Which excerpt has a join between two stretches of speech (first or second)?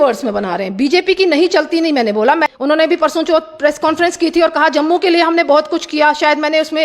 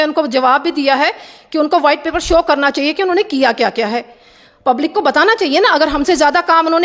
first